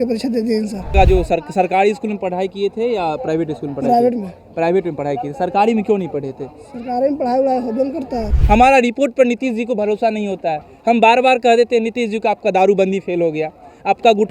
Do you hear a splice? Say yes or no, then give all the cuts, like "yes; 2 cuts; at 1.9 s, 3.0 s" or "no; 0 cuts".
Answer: yes; 2 cuts; at 0.9 s, 8.2 s